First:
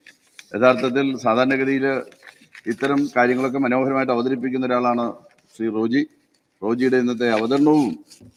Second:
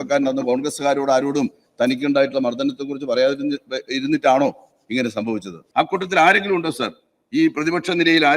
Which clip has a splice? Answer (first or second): second